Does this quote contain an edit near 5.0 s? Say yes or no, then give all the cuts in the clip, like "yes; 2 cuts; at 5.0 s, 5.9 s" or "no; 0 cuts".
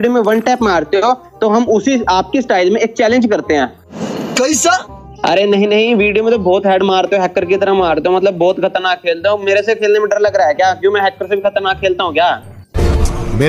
yes; 2 cuts; at 5.0 s, 12.6 s